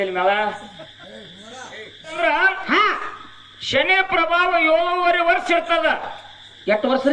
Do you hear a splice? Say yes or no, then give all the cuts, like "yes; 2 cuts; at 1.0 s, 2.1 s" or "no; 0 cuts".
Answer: yes; 1 cut; at 2.1 s